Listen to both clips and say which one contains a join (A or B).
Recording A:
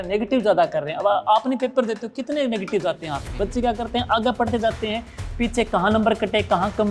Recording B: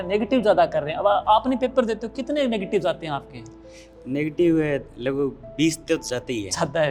A